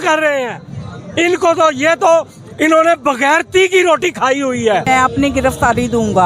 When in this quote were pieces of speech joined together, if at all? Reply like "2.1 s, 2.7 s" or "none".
4.8 s